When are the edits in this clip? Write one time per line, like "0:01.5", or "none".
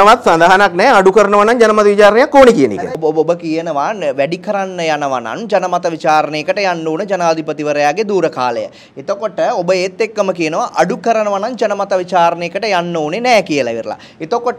none